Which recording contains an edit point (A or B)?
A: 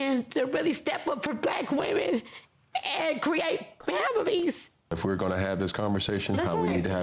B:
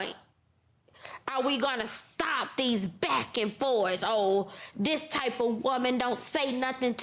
A